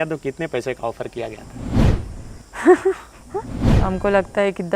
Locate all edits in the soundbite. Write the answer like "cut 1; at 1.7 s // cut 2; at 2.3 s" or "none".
cut 1; at 3.7 s